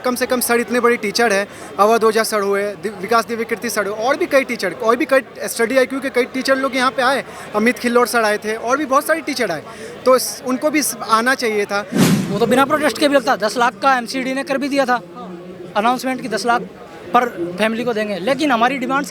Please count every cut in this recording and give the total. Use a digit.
1